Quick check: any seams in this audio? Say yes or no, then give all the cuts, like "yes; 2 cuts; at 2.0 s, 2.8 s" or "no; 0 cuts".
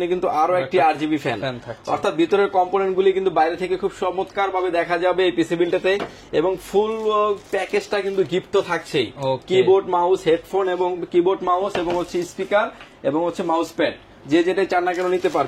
no; 0 cuts